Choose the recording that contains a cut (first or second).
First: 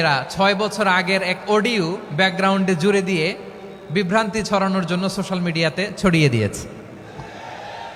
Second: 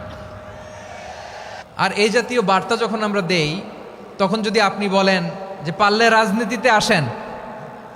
second